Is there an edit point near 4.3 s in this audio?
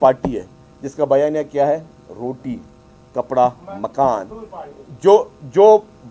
no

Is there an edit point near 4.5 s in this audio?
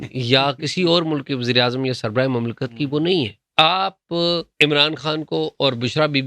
yes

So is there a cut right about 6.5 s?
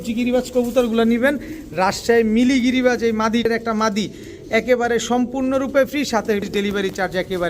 yes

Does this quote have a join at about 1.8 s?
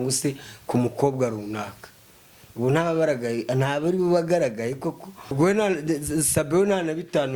no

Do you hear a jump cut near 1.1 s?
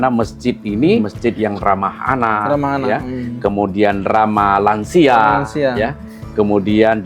yes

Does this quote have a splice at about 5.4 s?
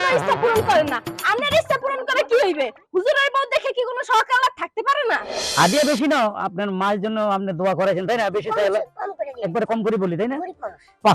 yes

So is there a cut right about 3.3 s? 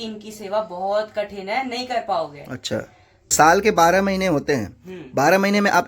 yes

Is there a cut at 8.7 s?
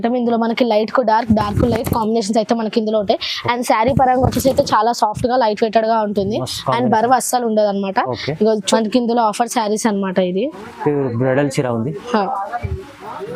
yes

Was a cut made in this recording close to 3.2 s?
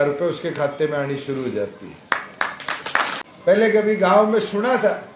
yes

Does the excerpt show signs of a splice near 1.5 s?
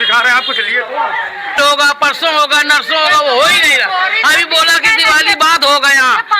yes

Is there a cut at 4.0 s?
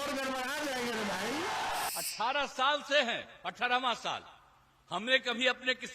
no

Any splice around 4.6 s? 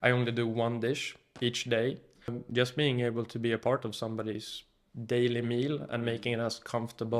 no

